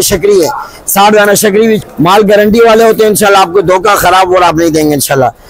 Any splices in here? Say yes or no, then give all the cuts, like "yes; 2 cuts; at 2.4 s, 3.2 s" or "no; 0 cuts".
yes; 1 cut; at 1.8 s